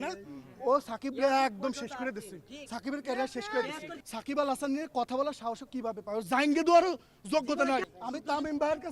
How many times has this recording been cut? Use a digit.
2